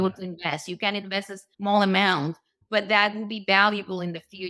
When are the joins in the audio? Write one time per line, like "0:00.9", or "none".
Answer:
0:01.4